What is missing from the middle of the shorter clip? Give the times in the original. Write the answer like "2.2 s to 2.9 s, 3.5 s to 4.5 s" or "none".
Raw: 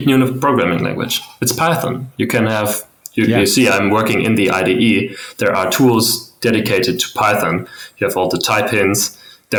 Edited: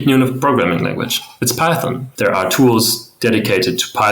2.0 s to 5.2 s